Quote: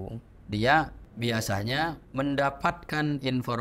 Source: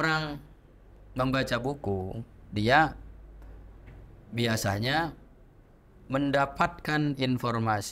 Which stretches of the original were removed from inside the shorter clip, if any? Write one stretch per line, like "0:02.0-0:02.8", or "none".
0:03.1-0:04.2
0:05.2-0:06.0